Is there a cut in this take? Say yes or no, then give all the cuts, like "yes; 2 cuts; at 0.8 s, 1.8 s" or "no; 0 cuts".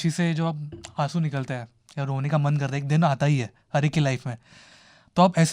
no; 0 cuts